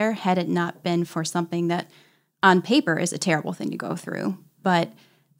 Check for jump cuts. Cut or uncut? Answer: uncut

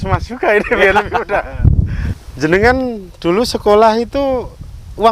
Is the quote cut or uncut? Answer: cut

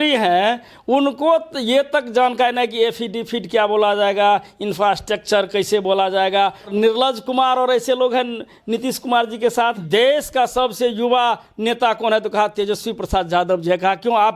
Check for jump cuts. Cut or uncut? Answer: cut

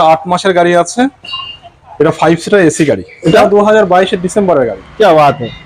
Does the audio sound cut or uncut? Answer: cut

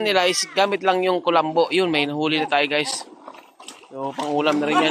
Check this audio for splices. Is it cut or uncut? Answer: uncut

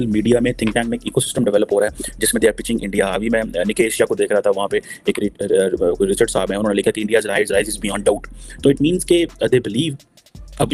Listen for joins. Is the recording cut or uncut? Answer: uncut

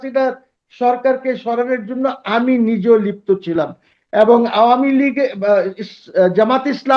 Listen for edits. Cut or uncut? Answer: uncut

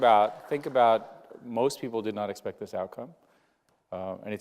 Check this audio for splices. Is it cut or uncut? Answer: cut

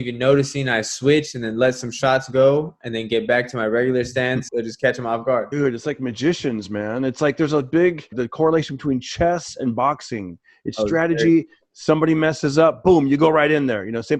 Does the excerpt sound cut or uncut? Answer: cut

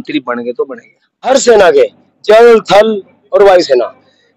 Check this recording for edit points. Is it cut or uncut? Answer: cut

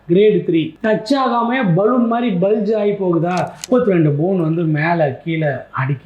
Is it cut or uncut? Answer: cut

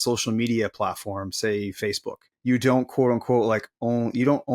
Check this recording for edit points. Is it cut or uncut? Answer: cut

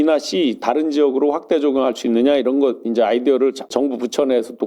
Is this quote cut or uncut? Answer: cut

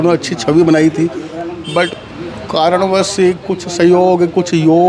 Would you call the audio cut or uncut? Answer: uncut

